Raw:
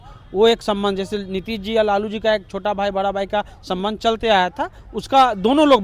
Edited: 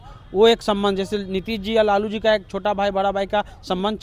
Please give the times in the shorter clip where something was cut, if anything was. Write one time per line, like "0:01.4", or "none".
none